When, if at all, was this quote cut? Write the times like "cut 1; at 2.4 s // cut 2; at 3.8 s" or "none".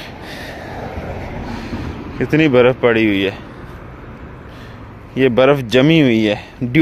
none